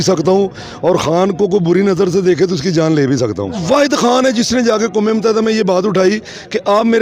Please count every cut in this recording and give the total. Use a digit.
1